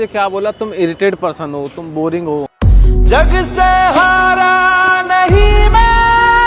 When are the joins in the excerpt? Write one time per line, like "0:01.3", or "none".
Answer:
none